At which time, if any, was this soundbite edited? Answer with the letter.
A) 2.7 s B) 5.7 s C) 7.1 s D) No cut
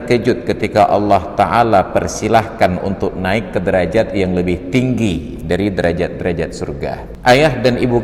C